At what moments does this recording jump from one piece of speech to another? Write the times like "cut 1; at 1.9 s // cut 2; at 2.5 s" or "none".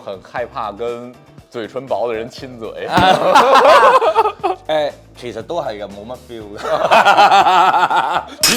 none